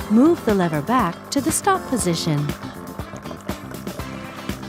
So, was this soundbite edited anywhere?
yes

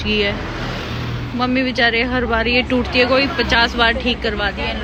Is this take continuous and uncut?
yes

